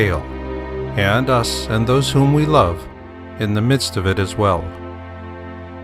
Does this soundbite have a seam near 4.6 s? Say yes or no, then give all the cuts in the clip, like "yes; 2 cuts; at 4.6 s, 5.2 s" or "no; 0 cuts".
yes; 1 cut; at 4.6 s